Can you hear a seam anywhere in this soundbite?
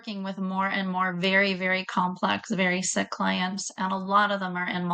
no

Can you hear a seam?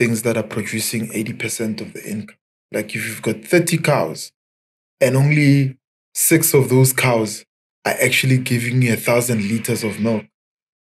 no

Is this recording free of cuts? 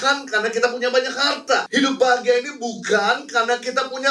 no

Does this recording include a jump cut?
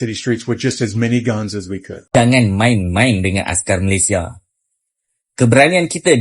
yes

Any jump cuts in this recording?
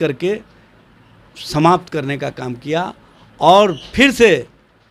no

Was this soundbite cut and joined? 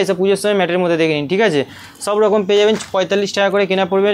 no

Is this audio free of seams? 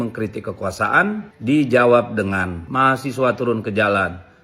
no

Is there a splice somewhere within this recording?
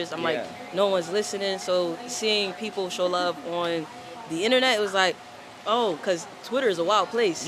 no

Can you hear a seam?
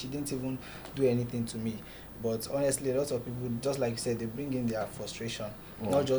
no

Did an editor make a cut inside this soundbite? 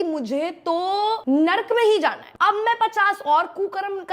yes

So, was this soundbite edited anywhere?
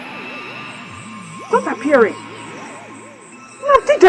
no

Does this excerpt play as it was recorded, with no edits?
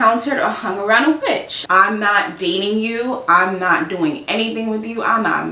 no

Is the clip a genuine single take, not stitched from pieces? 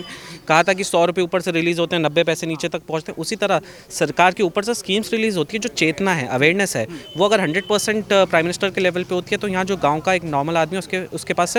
yes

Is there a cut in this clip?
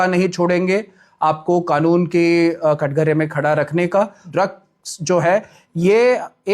yes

